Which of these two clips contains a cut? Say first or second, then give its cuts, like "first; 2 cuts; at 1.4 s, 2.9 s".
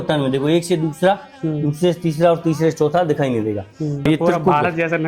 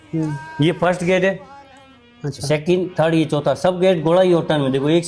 first; 1 cut; at 4.1 s